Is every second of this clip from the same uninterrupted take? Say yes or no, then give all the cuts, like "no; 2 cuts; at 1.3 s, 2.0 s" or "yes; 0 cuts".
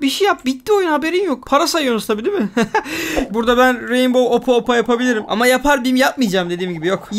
no; 1 cut; at 3.3 s